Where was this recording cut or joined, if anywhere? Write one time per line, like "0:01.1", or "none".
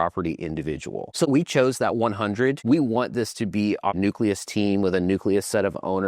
0:01.2
0:02.6
0:03.9